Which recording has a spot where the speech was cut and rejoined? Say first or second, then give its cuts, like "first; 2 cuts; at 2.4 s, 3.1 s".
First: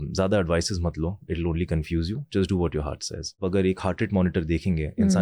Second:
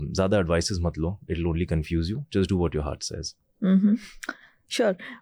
first; 1 cut; at 3.4 s